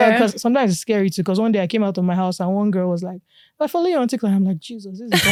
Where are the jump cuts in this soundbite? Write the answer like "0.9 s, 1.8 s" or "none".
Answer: none